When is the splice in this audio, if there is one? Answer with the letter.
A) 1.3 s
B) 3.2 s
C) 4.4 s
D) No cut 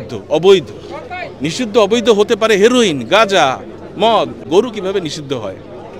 C